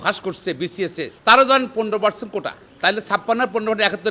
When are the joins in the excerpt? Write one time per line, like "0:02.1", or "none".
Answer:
0:01.1
0:02.6